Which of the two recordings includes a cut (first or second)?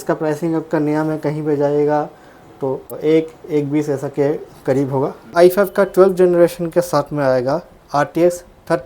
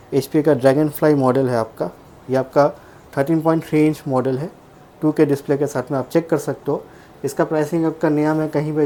first